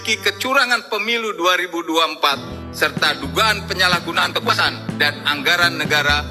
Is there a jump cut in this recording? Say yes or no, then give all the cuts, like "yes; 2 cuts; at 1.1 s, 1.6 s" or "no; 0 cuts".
no; 0 cuts